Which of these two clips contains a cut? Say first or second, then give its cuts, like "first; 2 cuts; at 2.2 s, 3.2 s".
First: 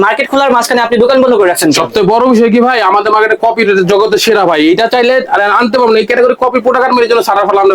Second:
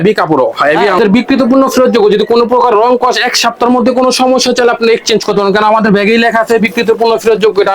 second; 1 cut; at 1.0 s